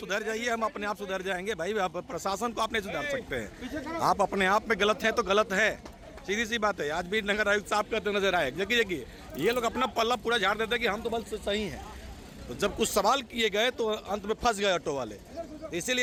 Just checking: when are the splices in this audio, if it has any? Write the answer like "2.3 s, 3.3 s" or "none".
none